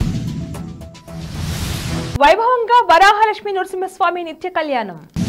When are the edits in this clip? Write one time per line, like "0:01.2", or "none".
0:01.7